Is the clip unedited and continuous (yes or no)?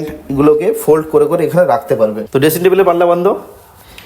no